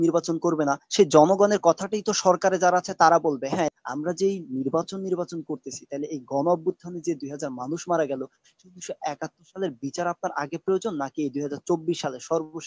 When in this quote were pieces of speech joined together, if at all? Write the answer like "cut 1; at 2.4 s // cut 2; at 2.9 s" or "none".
cut 1; at 3.7 s